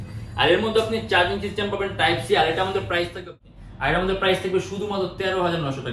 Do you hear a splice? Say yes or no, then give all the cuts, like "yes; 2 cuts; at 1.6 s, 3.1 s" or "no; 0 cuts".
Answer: yes; 1 cut; at 3.4 s